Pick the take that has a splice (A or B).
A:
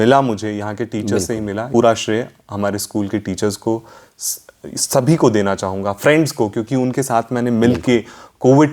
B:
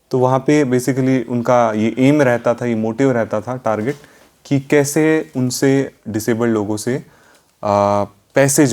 A